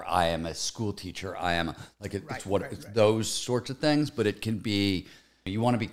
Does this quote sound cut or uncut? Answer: uncut